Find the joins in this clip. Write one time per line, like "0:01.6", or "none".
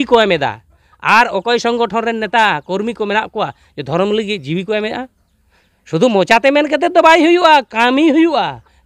none